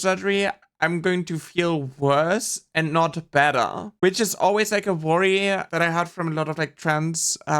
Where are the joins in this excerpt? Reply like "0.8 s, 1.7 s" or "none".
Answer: 5.7 s